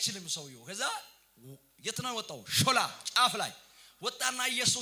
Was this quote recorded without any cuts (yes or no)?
yes